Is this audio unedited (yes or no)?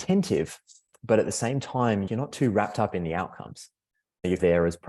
yes